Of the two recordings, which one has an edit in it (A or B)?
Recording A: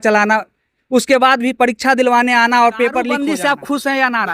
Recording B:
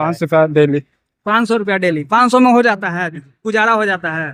A